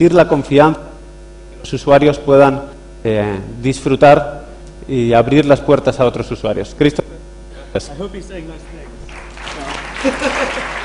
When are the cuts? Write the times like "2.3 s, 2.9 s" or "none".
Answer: none